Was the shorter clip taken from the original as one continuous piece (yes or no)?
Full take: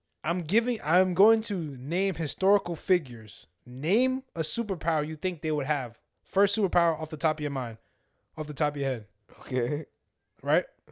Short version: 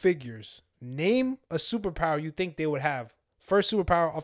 yes